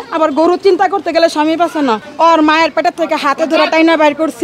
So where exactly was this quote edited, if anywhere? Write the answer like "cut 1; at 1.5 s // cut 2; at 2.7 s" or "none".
cut 1; at 2.1 s